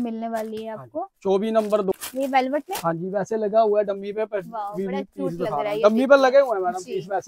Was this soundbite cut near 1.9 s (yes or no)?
yes